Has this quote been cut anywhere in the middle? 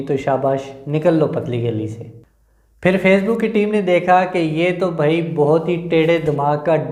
no; 0 cuts

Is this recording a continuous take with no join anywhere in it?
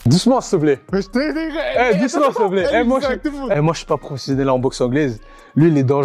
yes; 0 cuts

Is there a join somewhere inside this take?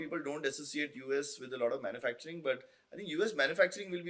no; 0 cuts

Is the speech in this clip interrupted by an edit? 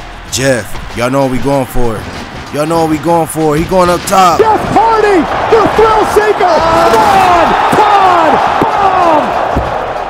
no; 0 cuts

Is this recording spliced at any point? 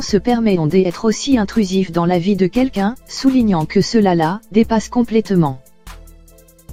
no; 0 cuts

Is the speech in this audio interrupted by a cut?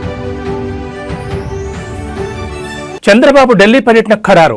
yes; 1 cut; at 2.3 s

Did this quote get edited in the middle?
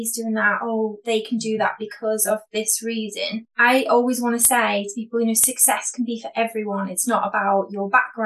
yes; 1 cut; at 3.5 s

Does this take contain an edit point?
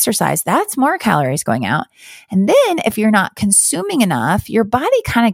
no; 0 cuts

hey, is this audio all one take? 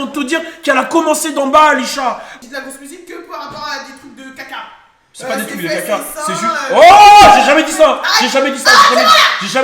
no; 1 cut; at 2.3 s

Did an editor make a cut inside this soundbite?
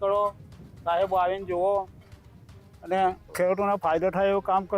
yes; 1 cut; at 3.2 s

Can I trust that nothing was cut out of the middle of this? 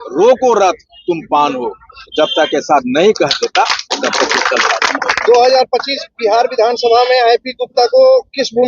no; 1 cut; at 4.8 s

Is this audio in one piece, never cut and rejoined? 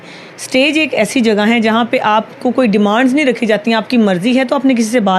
yes; 0 cuts

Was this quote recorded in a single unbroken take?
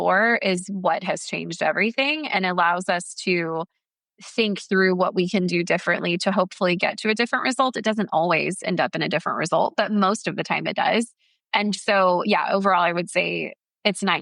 yes; 0 cuts

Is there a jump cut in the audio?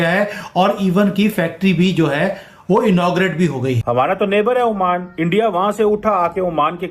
yes; 1 cut; at 3.8 s

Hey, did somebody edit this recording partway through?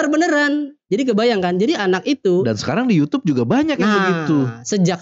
no; 0 cuts

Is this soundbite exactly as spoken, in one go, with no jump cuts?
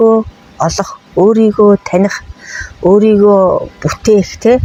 yes; 0 cuts

